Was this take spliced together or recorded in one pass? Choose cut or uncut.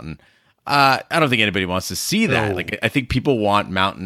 uncut